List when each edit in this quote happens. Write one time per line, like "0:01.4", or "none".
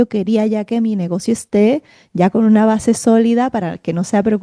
none